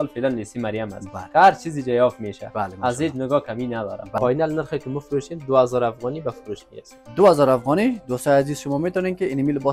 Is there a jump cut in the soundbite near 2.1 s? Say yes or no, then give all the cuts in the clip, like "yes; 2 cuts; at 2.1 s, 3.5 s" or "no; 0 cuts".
no; 1 cut; at 4.2 s